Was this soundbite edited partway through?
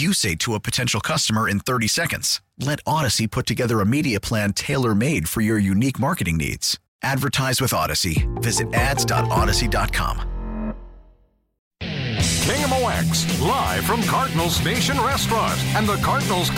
yes; 1 cut; at 11.5 s

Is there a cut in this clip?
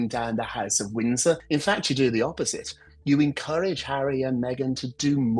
yes; 1 cut; at 1.4 s

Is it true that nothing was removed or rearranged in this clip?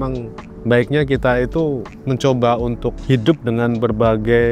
no; 1 cut; at 2.9 s

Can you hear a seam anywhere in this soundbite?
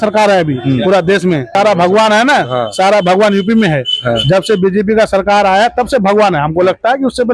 yes; 1 cut; at 1.5 s

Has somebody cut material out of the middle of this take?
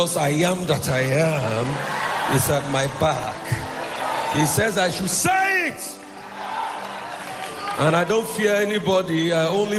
no; 0 cuts

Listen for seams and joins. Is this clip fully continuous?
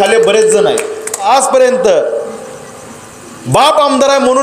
no; 1 cut; at 1.2 s

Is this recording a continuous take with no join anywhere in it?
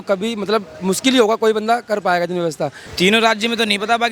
no; 1 cut; at 2.8 s

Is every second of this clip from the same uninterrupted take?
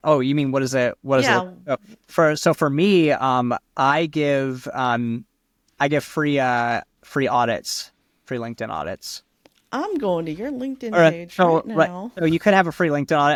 yes; 0 cuts

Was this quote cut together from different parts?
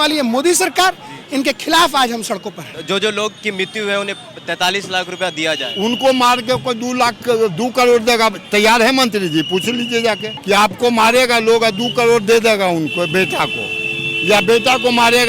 yes; 2 cuts; at 2.8 s, 10.3 s

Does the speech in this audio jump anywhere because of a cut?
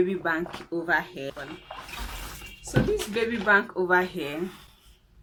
no; 0 cuts

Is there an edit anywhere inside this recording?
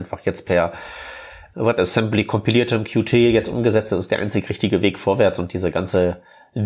yes; 1 cut; at 1.4 s

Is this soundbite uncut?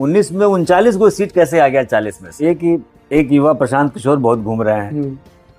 no; 1 cut; at 2.4 s

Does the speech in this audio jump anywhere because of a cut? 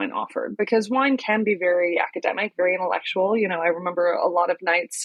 no; 0 cuts

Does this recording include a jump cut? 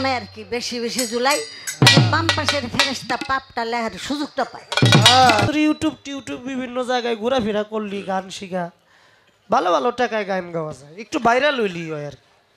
yes; 1 cut; at 5.5 s

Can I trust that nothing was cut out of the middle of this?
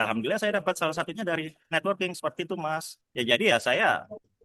no; 1 cut; at 3.0 s

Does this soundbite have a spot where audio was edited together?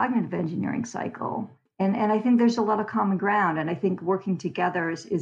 no; 0 cuts

